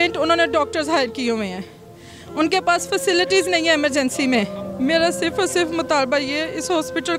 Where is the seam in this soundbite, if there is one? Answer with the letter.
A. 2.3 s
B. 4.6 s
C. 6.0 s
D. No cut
B